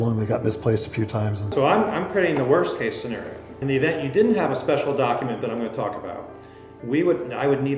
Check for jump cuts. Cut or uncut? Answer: cut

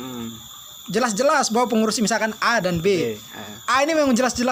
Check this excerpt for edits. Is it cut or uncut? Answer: uncut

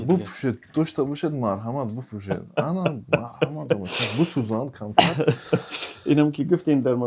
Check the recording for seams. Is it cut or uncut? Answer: uncut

